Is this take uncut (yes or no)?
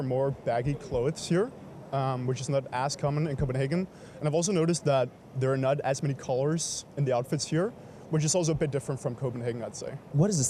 yes